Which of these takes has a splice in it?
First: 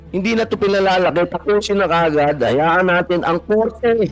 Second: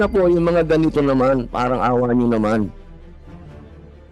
second; 1 cut; at 2.8 s

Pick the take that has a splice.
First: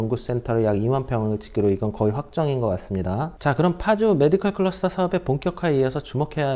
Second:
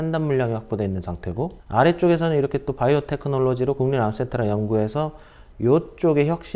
first; 1 cut; at 3.3 s

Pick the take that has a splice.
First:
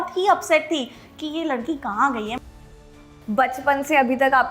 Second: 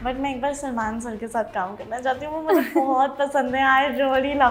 first; 1 cut; at 3.0 s

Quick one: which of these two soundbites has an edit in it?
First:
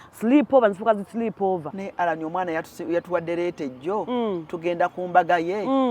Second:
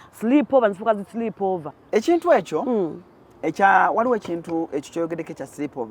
first; 1 cut; at 1.7 s

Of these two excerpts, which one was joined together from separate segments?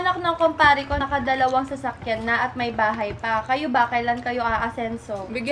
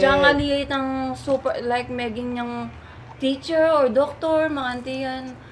first; 1 cut; at 1.0 s

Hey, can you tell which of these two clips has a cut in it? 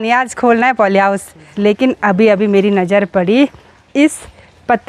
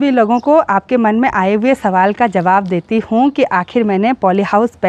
first; 1 cut; at 1.4 s

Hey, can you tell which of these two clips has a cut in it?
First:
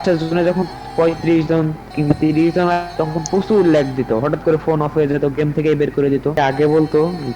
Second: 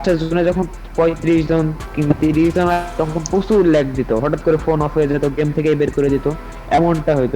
first; 1 cut; at 6.4 s

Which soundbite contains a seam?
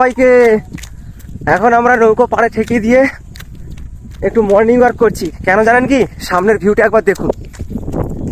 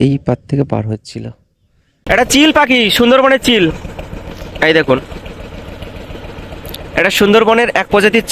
second; 1 cut; at 1.9 s

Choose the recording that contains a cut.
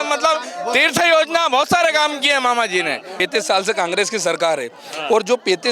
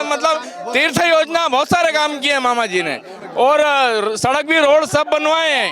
first; 1 cut; at 3.1 s

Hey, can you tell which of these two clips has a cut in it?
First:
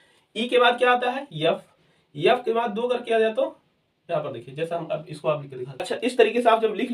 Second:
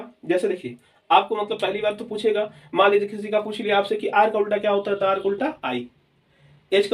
first; 1 cut; at 5.9 s

